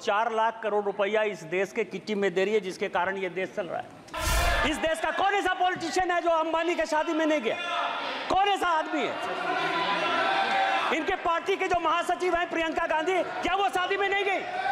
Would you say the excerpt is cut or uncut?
cut